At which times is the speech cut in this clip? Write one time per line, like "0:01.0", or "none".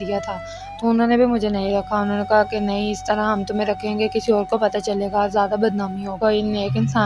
0:06.2

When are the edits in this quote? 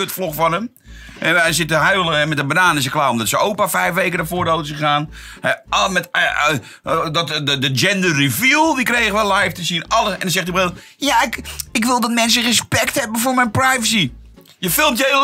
none

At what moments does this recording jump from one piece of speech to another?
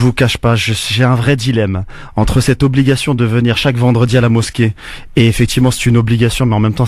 0:02.3

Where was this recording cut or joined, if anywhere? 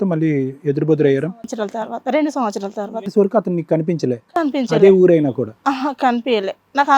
none

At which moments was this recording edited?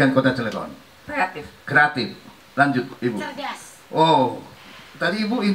none

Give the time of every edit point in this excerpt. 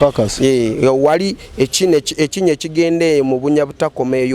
none

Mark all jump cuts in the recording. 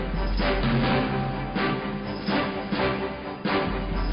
0:01.7

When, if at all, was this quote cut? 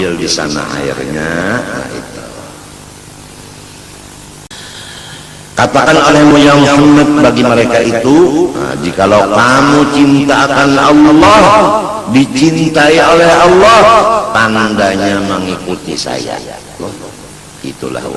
0:04.5
0:16.7

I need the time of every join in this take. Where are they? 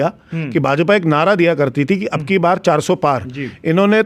none

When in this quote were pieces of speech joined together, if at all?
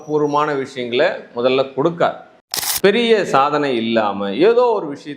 0:02.6

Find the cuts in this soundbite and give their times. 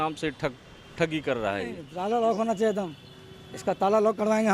0:01.9

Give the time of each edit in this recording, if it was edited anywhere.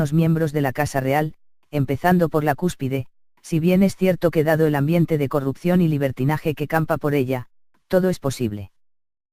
0:02.7

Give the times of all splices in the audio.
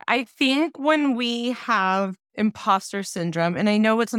0:02.2

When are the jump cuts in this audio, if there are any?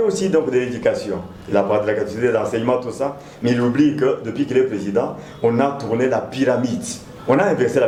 none

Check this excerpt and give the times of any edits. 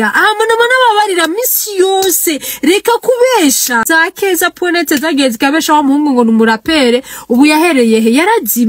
0:03.8

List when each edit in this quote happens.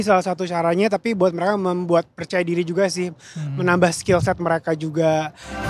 none

